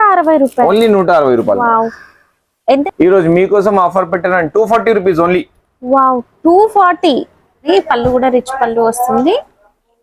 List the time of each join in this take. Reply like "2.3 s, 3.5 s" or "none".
2.3 s, 7.6 s